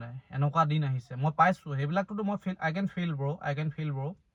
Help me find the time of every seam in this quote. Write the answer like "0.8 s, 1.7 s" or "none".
none